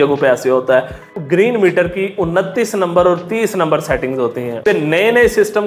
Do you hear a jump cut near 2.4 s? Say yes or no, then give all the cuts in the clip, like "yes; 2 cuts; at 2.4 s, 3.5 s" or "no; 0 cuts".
no; 2 cuts; at 1.1 s, 4.6 s